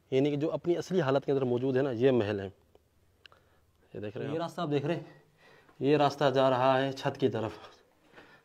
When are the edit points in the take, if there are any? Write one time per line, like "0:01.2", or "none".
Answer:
0:04.2